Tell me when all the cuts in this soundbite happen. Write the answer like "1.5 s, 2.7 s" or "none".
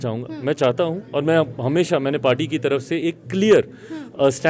none